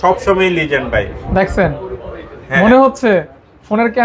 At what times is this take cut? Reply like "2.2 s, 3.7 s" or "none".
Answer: none